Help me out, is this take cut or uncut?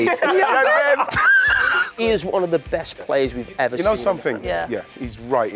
cut